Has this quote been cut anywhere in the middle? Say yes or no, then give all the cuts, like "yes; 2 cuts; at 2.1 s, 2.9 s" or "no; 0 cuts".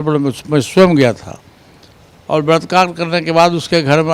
no; 0 cuts